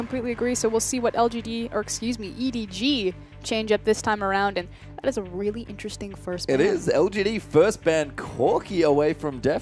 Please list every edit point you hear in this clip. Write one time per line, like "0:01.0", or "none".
none

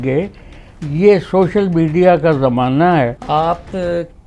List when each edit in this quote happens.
0:03.2

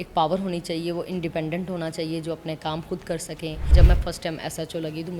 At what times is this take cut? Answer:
0:03.7

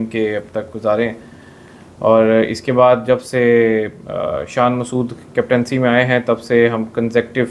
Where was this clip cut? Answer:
none

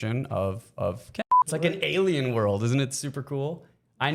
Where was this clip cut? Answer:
0:01.2

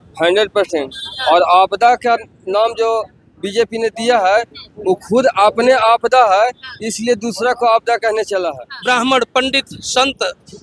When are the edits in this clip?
0:08.7

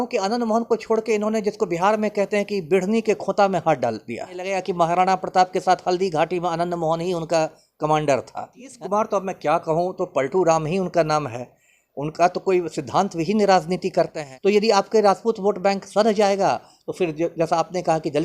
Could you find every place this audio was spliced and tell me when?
0:04.6
0:08.6
0:14.2

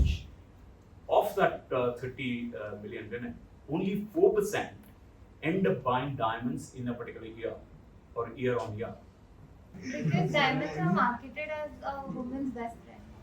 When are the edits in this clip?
0:09.8

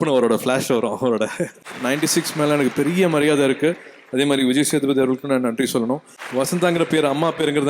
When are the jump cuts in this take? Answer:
0:01.7
0:06.1

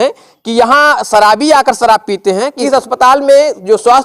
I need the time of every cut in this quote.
0:02.5

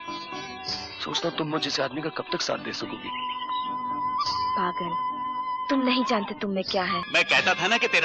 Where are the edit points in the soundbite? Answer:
0:07.1

